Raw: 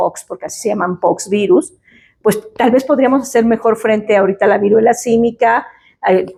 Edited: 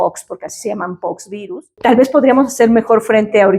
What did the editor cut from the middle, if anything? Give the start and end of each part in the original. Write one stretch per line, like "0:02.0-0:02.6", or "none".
0:01.7-0:02.5